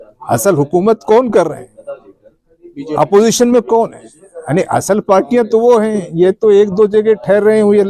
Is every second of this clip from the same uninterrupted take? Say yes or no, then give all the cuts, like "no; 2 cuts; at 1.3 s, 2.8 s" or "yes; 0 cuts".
yes; 0 cuts